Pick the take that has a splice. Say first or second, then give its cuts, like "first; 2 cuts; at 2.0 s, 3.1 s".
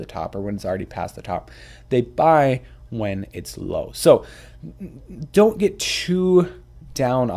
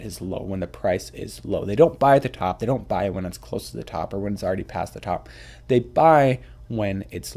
second; 1 cut; at 2.5 s